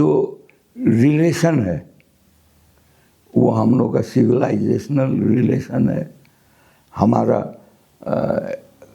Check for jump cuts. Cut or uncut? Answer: uncut